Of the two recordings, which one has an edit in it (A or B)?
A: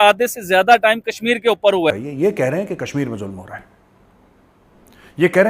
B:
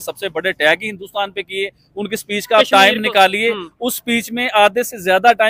A